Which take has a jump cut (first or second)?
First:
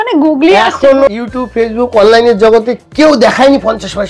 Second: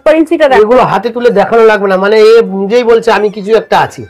first